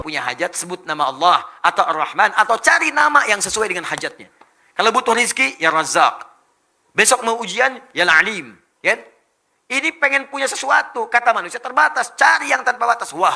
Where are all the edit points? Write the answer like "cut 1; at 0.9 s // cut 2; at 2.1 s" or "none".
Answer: none